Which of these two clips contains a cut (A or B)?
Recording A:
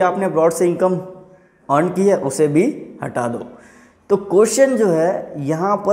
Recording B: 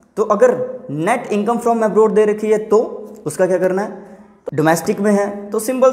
B